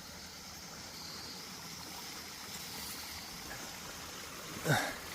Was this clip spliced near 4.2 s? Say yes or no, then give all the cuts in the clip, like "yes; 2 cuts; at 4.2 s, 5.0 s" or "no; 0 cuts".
no; 1 cut; at 0.9 s